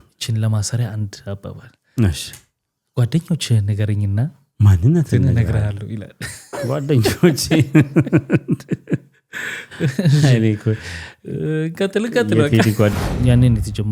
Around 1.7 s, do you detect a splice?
no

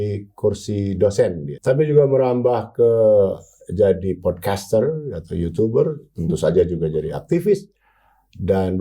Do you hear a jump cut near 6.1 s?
no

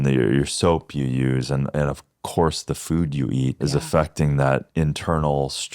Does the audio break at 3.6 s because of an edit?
yes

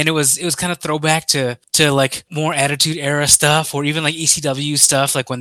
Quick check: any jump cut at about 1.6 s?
yes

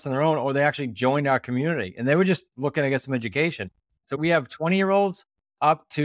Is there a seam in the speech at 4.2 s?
yes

